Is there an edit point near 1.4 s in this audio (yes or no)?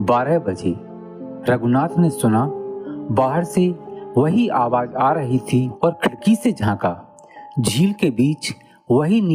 no